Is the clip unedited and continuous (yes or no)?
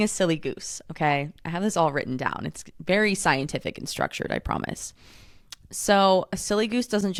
yes